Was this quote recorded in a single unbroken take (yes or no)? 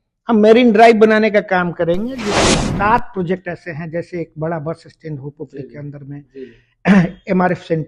no